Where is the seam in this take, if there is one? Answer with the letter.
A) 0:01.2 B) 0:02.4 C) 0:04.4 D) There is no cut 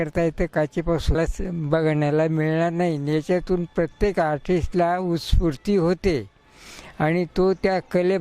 A